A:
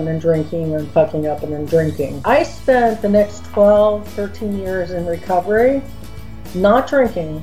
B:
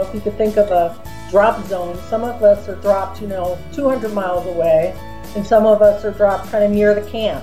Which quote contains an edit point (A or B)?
A